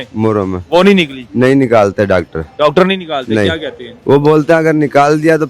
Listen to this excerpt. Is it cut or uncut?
uncut